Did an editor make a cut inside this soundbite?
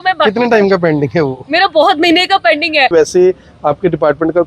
yes; 1 cut; at 2.9 s

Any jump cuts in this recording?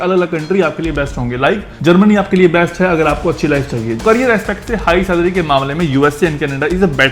yes; 2 cuts; at 1.7 s, 4.0 s

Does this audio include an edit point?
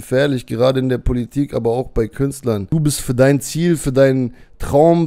yes; 1 cut; at 2.6 s

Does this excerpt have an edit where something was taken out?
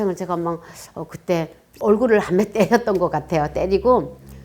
yes; 1 cut; at 1.6 s

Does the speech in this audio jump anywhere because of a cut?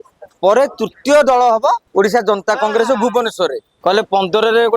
yes; 2 cuts; at 1.8 s, 3.7 s

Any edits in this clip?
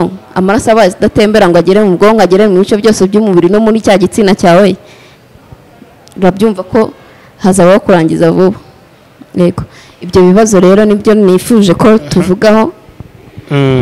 no; 0 cuts

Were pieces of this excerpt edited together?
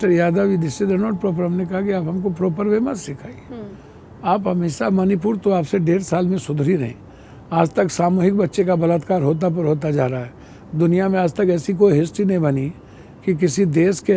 no; 0 cuts

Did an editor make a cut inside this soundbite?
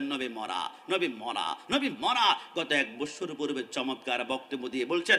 no; 0 cuts

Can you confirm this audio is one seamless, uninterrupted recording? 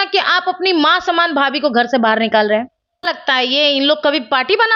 no; 1 cut; at 3.1 s

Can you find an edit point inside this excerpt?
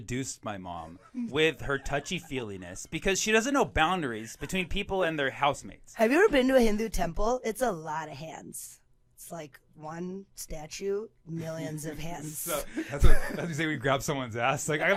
no; 0 cuts

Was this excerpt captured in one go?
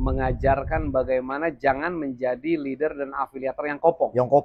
yes; 0 cuts

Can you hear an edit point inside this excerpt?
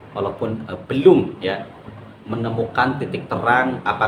no; 0 cuts

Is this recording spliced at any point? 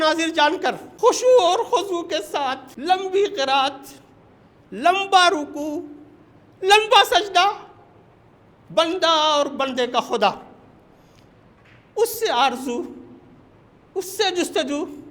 yes; 2 cuts; at 0.9 s, 2.7 s

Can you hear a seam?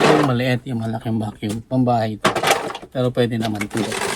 no; 0 cuts

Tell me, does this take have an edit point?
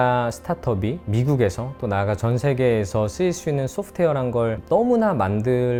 no; 0 cuts

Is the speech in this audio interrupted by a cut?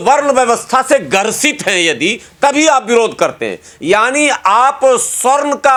no; 0 cuts

